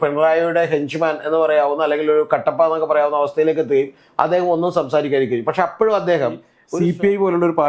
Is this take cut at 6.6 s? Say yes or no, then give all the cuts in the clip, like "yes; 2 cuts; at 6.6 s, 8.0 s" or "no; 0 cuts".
yes; 1 cut; at 6.6 s